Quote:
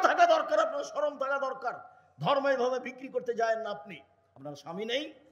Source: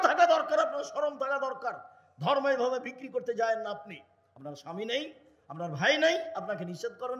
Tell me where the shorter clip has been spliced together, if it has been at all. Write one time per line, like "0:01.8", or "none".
none